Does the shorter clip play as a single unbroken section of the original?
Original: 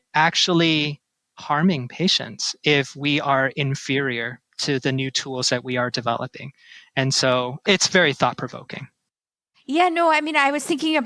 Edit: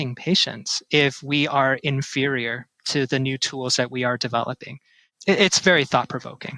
no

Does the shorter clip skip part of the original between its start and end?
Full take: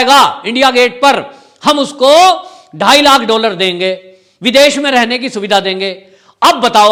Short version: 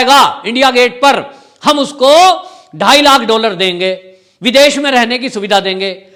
no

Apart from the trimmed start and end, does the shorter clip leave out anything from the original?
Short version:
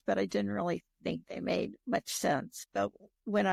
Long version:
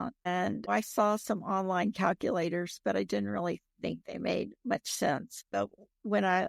no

